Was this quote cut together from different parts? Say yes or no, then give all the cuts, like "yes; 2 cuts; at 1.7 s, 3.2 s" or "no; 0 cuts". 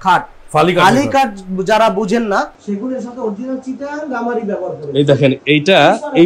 yes; 1 cut; at 2.6 s